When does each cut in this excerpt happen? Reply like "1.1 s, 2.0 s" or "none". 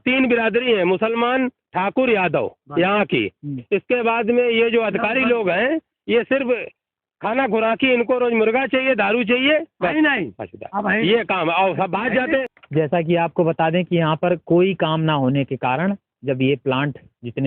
12.6 s

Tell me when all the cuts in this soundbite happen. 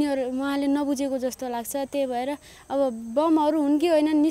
none

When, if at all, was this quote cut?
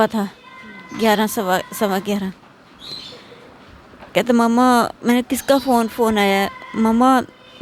none

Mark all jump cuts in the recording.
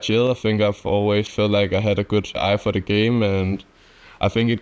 2.4 s

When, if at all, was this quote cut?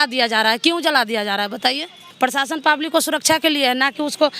2.0 s

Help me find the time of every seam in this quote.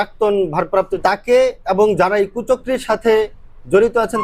0.9 s

